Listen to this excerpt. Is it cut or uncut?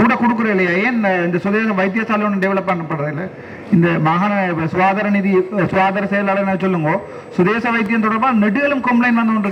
uncut